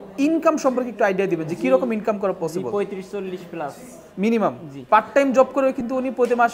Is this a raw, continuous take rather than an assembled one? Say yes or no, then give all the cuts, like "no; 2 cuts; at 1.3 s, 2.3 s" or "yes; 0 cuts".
no; 1 cut; at 4.7 s